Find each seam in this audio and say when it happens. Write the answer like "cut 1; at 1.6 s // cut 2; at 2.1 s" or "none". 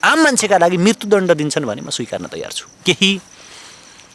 cut 1; at 2.8 s